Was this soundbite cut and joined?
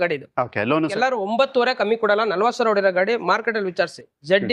yes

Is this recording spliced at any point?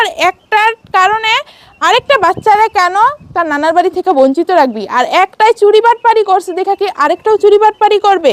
no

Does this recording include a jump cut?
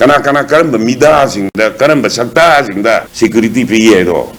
no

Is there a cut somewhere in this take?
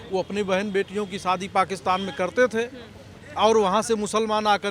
no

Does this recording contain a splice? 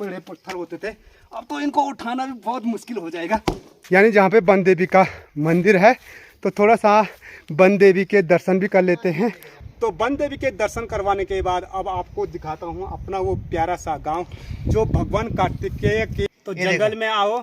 yes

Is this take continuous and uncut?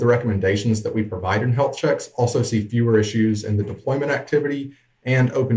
yes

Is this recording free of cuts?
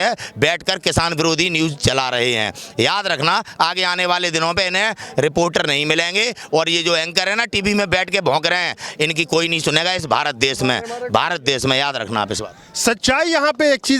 yes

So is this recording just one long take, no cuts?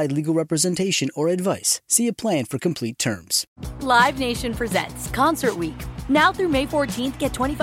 no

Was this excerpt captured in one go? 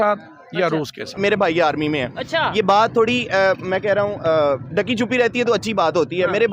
no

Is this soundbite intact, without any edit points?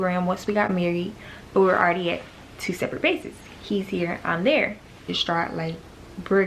no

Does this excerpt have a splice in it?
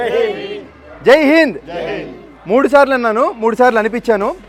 no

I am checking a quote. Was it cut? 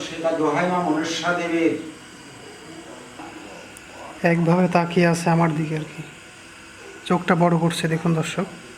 yes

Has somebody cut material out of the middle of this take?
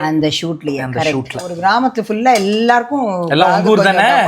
yes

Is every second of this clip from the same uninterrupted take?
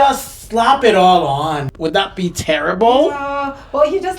no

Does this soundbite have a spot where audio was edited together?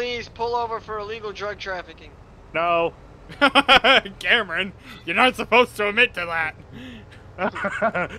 no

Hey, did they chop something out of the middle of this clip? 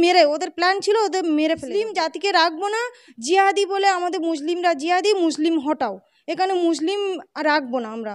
yes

